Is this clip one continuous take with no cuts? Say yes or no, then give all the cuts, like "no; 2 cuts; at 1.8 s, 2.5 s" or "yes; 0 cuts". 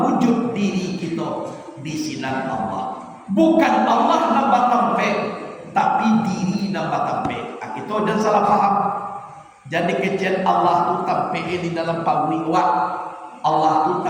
yes; 0 cuts